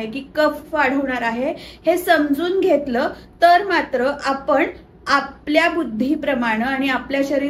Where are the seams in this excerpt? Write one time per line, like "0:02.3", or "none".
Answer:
none